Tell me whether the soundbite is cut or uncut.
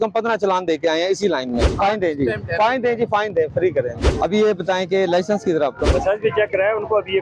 cut